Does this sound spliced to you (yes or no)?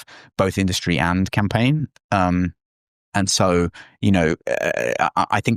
no